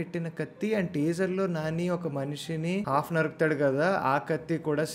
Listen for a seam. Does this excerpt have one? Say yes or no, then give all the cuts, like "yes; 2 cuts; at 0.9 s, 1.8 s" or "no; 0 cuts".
yes; 1 cut; at 2.9 s